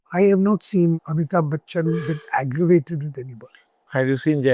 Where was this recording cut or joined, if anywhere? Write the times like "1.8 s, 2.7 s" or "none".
1.0 s